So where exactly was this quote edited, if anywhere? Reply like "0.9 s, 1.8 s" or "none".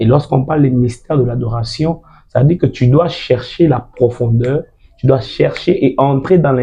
none